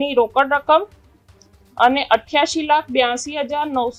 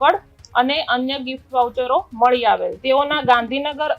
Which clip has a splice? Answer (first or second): second